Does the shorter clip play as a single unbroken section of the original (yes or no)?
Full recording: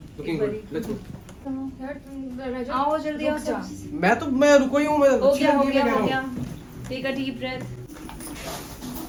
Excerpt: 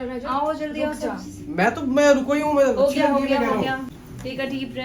no